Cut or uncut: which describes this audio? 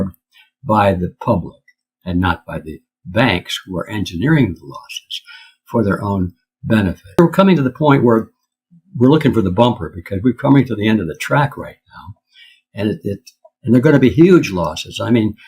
cut